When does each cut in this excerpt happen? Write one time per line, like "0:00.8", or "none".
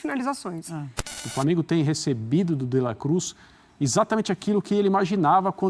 0:01.2